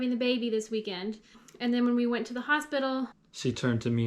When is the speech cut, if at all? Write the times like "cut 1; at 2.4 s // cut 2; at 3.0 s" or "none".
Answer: cut 1; at 1.5 s // cut 2; at 3.2 s